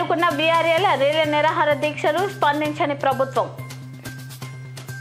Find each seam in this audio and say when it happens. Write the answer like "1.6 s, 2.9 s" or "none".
none